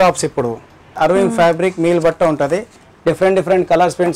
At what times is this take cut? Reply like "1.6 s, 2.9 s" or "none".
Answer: 0.9 s

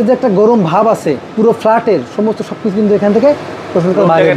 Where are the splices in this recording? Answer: 1.3 s

